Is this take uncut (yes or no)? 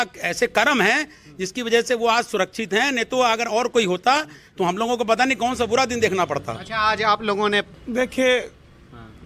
no